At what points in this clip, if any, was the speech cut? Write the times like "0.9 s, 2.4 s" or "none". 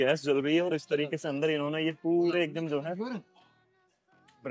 none